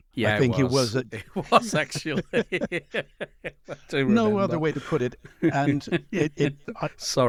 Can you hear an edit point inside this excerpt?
no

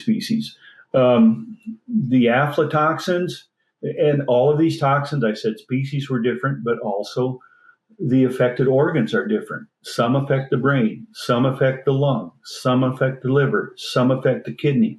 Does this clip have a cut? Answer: no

